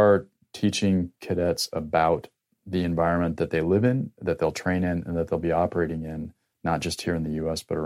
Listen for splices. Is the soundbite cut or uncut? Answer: uncut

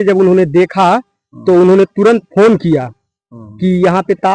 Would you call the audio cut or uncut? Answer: uncut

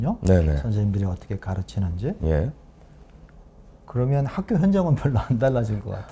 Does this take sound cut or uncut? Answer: uncut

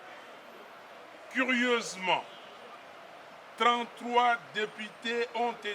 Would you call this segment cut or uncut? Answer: uncut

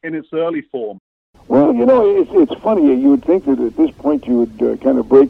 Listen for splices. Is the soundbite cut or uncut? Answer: cut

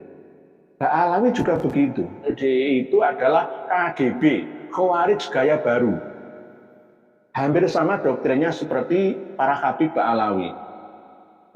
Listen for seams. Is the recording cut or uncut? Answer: cut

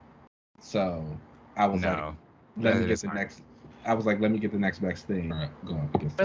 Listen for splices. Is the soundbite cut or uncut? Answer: cut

